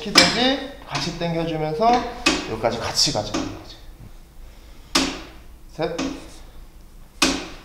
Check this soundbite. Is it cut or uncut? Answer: uncut